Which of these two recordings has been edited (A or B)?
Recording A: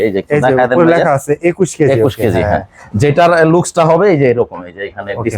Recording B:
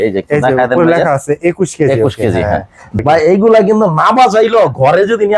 B